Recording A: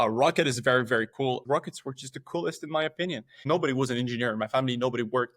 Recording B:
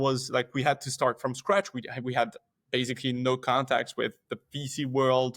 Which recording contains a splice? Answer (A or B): A